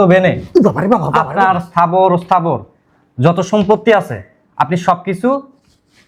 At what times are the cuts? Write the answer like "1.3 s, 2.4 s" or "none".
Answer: none